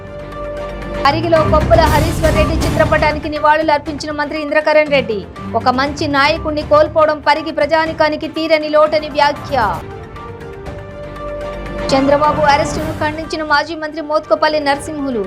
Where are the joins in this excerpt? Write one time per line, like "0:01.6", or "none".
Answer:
0:01.0